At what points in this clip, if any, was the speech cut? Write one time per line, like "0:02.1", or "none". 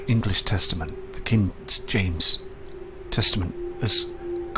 none